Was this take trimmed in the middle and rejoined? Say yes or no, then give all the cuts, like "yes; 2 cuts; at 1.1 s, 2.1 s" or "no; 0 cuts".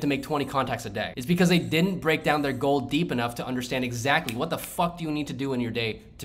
yes; 1 cut; at 1.2 s